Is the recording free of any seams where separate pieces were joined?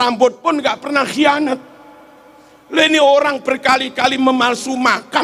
yes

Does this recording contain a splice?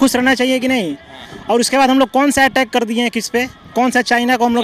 no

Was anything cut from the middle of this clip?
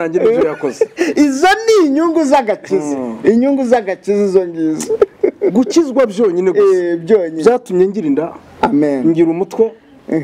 no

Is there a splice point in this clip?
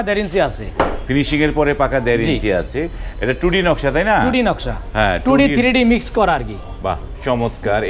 no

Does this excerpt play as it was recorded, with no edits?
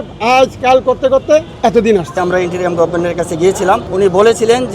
no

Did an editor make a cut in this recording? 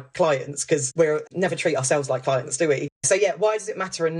yes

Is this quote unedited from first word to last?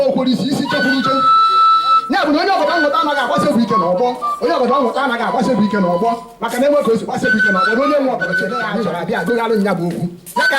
no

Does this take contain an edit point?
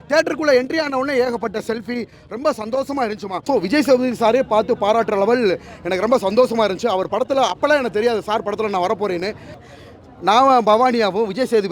yes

